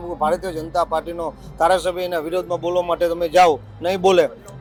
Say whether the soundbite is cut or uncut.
uncut